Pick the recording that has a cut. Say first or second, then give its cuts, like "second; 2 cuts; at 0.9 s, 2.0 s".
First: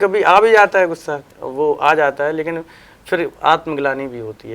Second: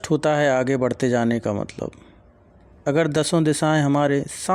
first; 1 cut; at 1.2 s